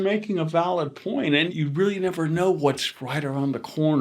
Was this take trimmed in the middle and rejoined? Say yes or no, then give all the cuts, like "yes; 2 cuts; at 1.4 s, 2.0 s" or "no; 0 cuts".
yes; 1 cut; at 1.5 s